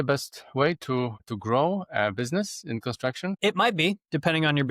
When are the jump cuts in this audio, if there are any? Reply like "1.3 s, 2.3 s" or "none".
1.3 s, 3.4 s

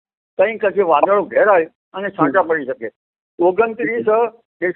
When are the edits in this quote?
none

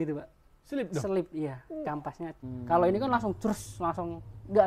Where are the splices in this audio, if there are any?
2.4 s

